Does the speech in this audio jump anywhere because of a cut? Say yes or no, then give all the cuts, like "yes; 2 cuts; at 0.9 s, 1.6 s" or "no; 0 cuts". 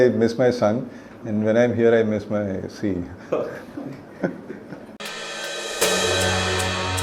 no; 0 cuts